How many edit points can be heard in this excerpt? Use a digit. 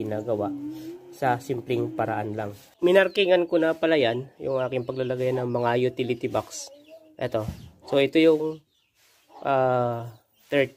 1